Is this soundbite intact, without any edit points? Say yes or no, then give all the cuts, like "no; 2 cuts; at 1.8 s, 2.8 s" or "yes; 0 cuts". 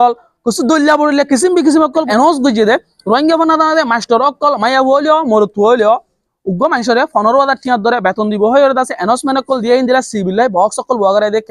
no; 1 cut; at 2.1 s